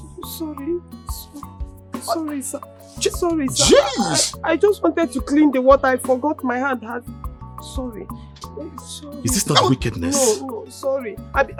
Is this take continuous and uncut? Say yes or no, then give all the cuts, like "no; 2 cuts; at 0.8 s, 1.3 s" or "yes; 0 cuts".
yes; 0 cuts